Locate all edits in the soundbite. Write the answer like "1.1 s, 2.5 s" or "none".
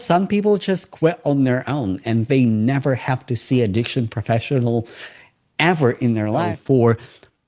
6.6 s